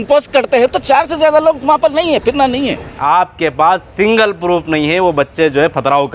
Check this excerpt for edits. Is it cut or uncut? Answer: cut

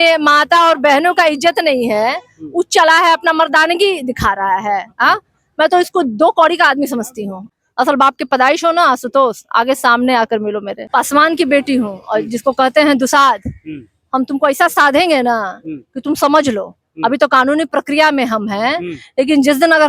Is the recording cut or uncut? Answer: cut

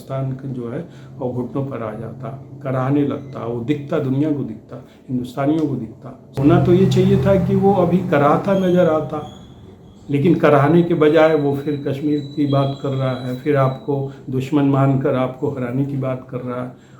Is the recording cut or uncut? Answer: cut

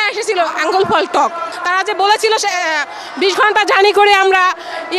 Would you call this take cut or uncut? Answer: cut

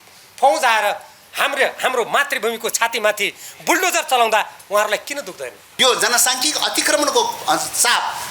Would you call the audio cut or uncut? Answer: cut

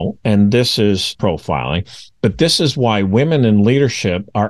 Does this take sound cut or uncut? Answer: cut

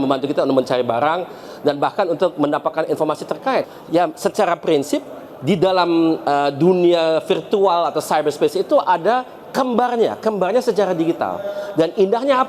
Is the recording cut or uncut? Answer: cut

